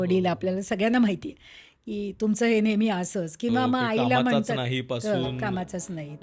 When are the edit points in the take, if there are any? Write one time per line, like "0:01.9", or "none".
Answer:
none

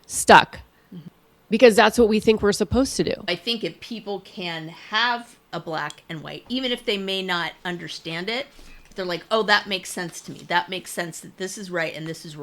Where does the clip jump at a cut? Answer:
0:03.4

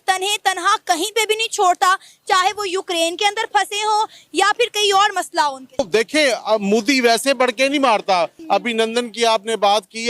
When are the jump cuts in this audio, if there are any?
0:05.9
0:08.4

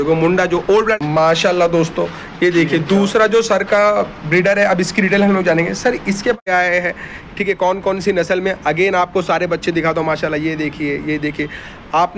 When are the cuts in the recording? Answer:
0:01.0
0:06.4

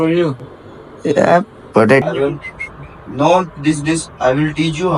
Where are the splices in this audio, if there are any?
0:02.1

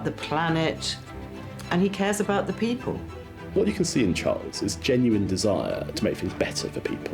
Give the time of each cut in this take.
0:03.5

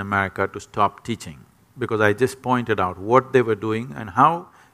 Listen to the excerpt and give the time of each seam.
none

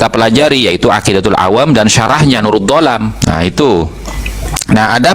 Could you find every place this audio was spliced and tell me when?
0:03.2

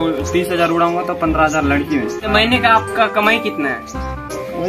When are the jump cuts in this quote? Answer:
0:02.3

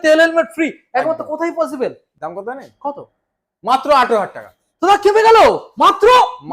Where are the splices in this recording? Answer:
0:02.1

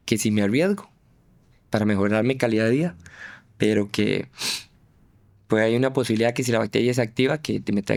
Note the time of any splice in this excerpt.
none

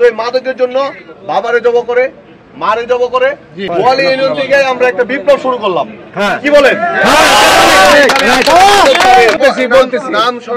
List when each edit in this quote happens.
0:03.7
0:09.4

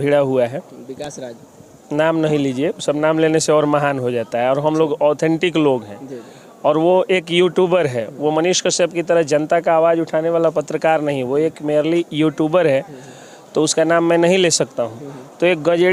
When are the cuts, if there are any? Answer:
none

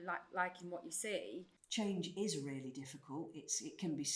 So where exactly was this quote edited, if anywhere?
0:01.5

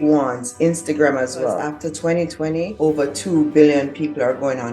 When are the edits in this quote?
0:01.7
0:02.7

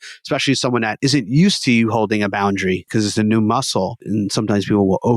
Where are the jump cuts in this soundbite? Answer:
0:00.9
0:02.9
0:04.0

